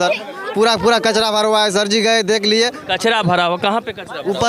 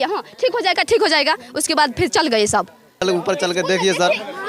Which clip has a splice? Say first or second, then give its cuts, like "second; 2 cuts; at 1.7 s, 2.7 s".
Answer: second; 1 cut; at 3.0 s